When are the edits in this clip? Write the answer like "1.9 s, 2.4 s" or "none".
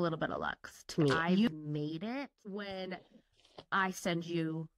1.2 s, 2.4 s